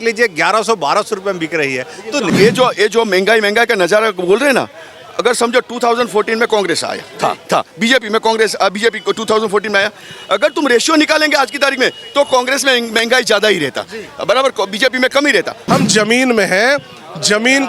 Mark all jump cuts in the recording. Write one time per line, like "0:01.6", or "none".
0:02.3
0:15.6